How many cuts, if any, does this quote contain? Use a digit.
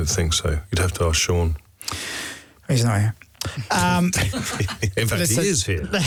0